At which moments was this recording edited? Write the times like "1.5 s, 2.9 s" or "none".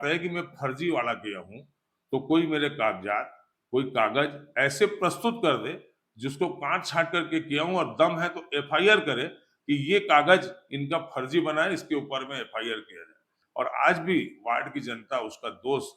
13.4 s

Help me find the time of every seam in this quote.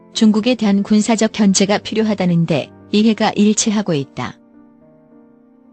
4.5 s

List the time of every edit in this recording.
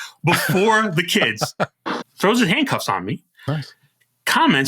1.8 s

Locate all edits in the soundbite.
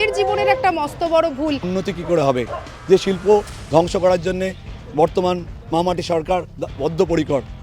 1.7 s

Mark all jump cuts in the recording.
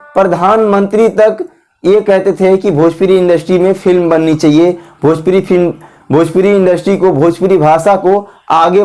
none

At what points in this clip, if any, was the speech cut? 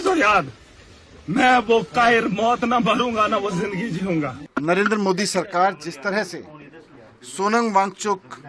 4.4 s

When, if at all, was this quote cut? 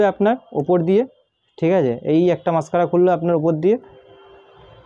none

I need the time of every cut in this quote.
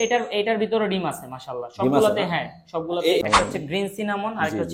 3.2 s

